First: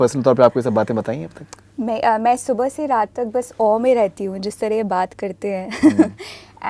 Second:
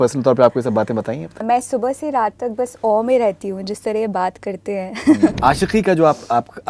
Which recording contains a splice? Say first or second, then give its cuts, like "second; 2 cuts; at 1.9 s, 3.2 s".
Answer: second; 2 cuts; at 1.4 s, 5.4 s